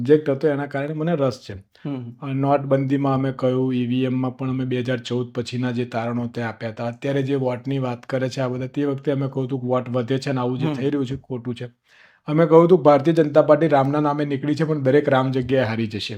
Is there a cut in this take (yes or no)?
no